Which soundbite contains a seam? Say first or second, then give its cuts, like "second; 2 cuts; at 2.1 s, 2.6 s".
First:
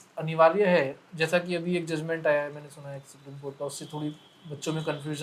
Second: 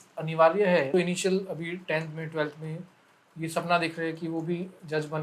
second; 1 cut; at 0.9 s